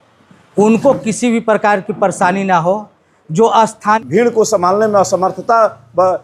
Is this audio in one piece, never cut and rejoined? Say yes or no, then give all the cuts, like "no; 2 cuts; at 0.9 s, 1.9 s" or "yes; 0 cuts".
no; 1 cut; at 4.0 s